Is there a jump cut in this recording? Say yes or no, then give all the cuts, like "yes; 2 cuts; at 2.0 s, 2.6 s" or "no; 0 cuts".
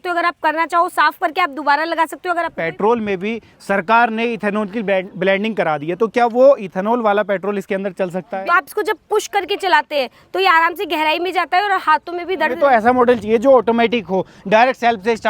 yes; 3 cuts; at 2.3 s, 8.3 s, 12.6 s